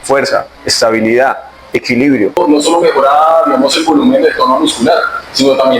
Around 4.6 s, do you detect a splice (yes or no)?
no